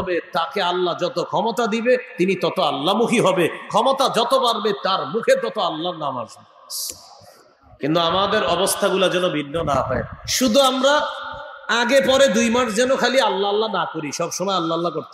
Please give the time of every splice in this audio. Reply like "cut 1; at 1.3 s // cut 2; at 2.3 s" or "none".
none